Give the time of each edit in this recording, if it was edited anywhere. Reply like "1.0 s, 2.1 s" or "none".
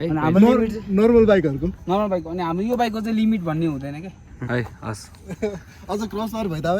4.4 s